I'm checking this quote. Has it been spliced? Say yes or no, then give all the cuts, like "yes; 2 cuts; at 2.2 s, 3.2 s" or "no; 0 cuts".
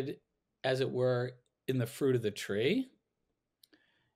no; 0 cuts